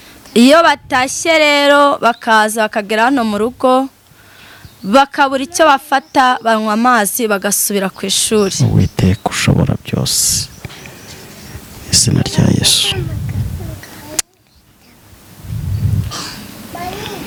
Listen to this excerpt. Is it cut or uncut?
uncut